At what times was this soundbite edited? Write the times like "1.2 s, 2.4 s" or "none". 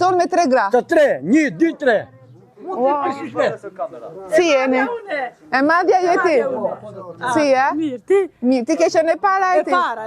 none